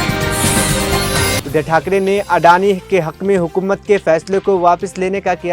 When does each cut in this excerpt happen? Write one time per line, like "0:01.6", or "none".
0:01.4